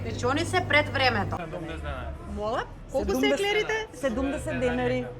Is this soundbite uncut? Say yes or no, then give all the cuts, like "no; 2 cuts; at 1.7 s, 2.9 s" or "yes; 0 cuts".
no; 1 cut; at 1.4 s